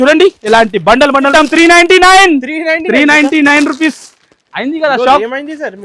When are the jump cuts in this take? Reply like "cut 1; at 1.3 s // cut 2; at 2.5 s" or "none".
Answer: cut 1; at 1.3 s